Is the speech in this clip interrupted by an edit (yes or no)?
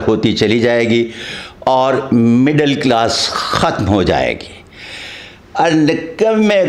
no